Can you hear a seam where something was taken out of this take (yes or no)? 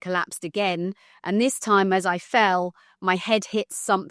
no